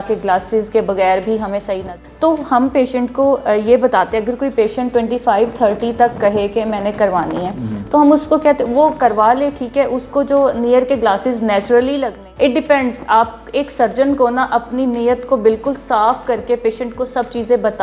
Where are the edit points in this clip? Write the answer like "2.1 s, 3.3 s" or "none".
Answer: 1.8 s, 12.2 s

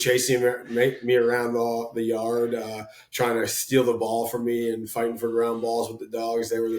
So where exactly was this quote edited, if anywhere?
none

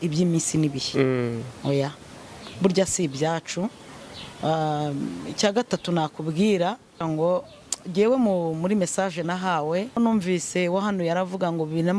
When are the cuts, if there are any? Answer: 7.0 s, 10.0 s

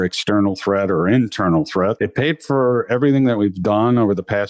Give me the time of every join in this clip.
2.0 s

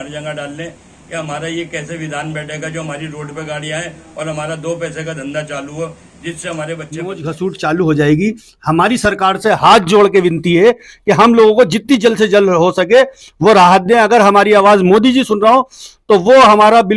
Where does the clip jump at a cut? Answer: 7.2 s

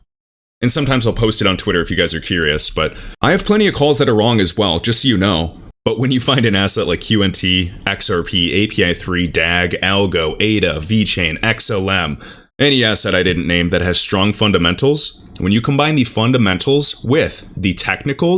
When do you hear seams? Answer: none

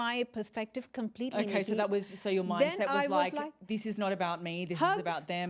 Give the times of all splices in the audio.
none

